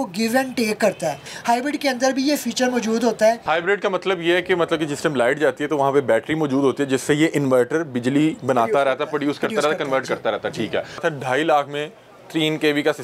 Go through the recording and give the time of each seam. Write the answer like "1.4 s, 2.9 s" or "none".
1.2 s, 3.4 s, 11.0 s